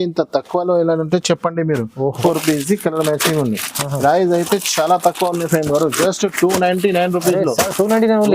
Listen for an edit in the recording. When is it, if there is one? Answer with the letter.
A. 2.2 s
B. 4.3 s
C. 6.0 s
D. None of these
A